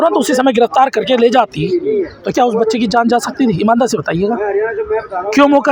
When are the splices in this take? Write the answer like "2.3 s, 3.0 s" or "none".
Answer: none

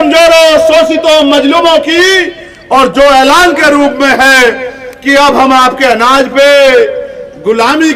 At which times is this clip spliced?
none

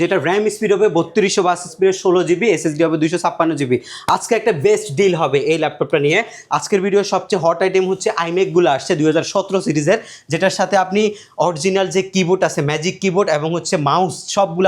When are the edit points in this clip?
6.4 s

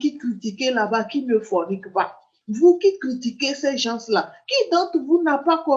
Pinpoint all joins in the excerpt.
none

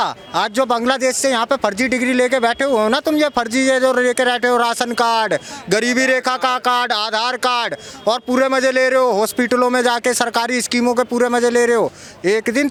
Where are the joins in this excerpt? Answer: none

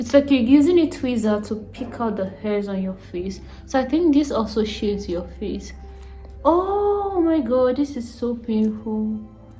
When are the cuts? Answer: none

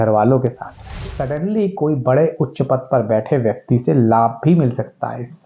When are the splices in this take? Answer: 1.1 s

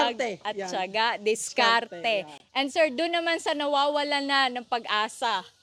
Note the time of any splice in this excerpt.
none

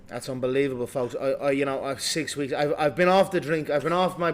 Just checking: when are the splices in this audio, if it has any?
1.2 s

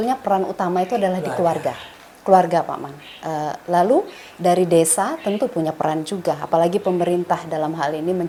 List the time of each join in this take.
none

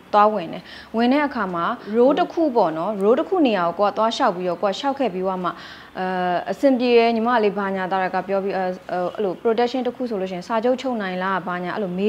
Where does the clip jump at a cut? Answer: 1.8 s

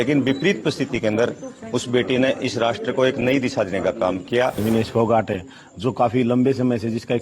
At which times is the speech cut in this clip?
4.6 s

